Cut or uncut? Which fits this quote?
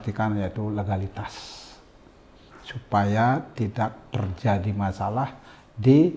uncut